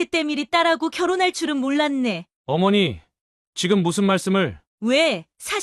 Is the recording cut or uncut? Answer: cut